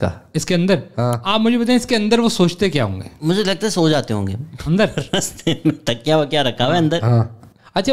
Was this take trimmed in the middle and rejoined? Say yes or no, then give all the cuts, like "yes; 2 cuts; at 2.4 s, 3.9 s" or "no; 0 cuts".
no; 0 cuts